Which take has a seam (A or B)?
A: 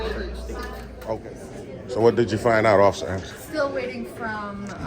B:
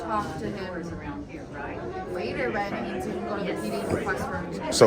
A